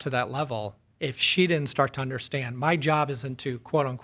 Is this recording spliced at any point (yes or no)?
no